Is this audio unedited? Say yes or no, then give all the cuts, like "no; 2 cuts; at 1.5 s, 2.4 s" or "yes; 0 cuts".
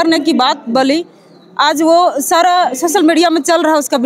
yes; 0 cuts